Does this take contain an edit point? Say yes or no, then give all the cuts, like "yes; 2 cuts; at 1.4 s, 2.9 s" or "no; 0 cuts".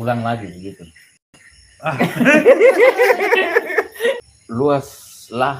yes; 1 cut; at 4.4 s